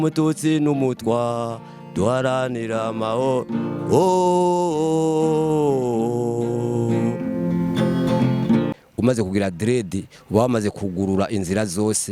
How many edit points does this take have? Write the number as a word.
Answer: one